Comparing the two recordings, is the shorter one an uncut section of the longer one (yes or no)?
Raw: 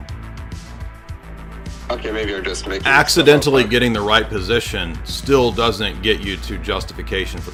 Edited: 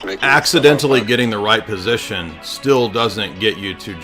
yes